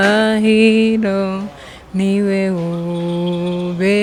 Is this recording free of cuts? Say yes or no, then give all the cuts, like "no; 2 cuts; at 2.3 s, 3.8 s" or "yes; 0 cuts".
yes; 0 cuts